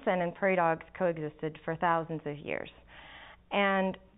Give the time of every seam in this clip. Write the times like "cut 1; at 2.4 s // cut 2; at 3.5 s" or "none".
none